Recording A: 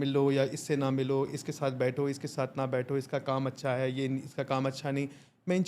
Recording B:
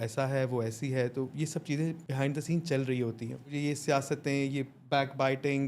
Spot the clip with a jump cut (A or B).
B